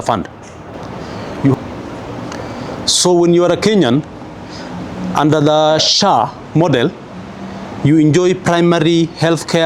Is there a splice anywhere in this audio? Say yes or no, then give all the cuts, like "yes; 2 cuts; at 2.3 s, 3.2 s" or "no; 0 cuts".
yes; 1 cut; at 1.5 s